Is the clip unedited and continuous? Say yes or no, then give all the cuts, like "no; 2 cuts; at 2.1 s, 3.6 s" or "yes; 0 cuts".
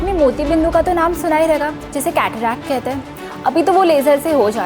yes; 0 cuts